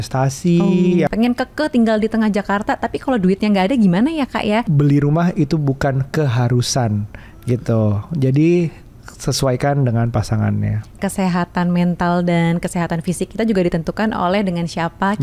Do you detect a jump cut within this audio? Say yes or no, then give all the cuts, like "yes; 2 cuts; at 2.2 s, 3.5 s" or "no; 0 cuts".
yes; 3 cuts; at 1.1 s, 4.7 s, 11.0 s